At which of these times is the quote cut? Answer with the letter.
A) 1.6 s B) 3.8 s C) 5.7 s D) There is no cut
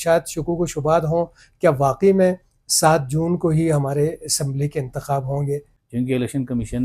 C